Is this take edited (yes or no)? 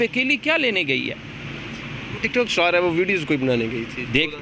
no